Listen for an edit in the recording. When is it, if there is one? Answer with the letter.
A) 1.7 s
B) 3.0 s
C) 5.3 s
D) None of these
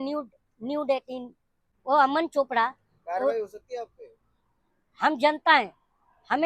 A